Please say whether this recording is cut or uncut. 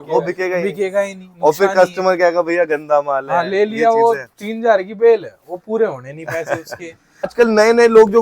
cut